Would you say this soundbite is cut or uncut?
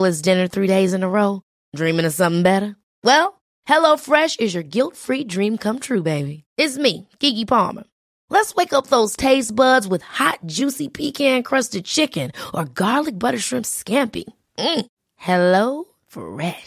uncut